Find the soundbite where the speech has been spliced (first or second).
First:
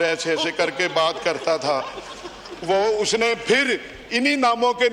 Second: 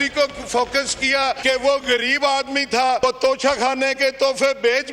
second